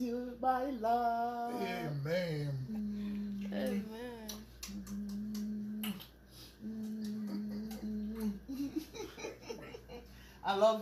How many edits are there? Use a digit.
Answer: 1